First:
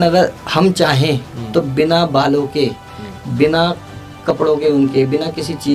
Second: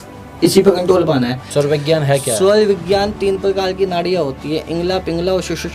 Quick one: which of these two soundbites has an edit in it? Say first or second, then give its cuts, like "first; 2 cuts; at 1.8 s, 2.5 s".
second; 1 cut; at 1.4 s